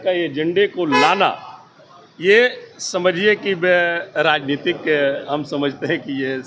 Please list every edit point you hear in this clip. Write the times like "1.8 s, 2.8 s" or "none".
none